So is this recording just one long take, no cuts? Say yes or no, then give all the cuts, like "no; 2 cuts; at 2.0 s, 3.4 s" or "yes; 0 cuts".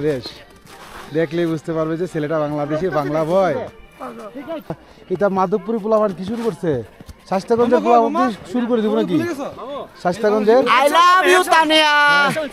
no; 1 cut; at 4.9 s